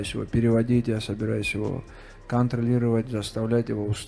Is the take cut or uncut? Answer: uncut